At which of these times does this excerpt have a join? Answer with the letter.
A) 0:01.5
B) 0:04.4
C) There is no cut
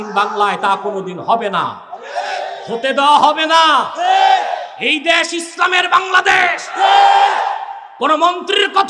C